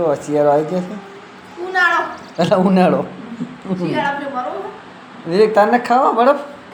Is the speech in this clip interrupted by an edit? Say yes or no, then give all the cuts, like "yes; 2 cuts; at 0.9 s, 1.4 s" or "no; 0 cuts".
no; 0 cuts